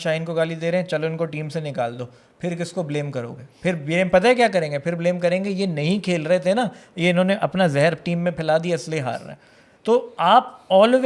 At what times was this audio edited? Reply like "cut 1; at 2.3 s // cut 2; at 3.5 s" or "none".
none